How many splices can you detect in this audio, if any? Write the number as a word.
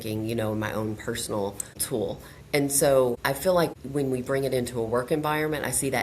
two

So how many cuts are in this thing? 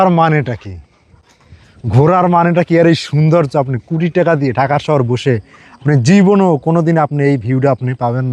zero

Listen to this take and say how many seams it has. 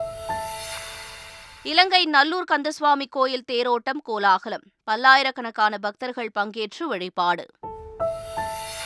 one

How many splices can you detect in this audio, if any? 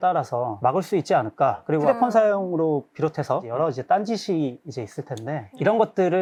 zero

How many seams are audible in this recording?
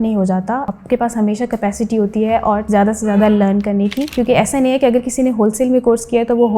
one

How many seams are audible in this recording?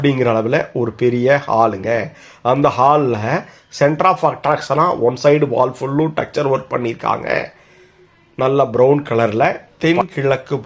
one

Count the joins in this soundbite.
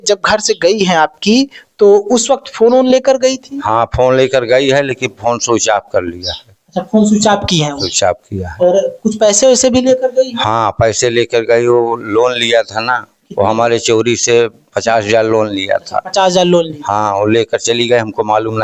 zero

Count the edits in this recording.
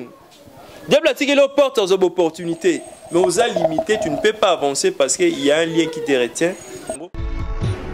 one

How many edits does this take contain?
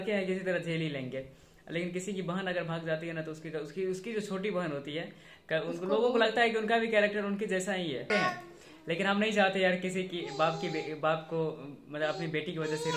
one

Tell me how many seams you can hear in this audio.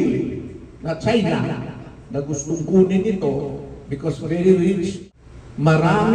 one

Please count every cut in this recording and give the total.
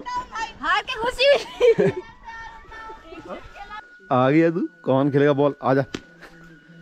one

